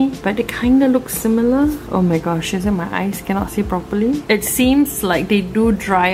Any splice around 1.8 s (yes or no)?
no